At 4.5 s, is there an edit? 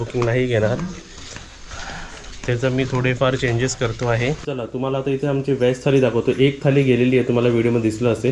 yes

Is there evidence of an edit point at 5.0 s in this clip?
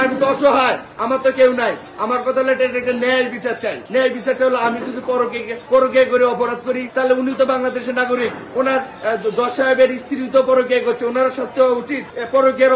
no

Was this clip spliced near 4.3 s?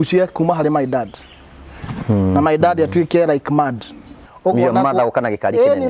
yes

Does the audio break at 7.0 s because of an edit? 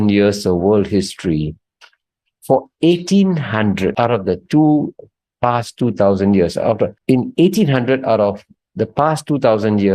yes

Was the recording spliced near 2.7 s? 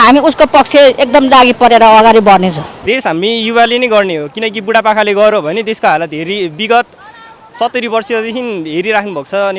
yes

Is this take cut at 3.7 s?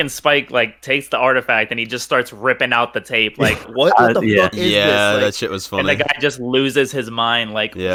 no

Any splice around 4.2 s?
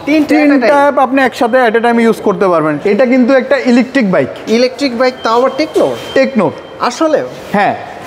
no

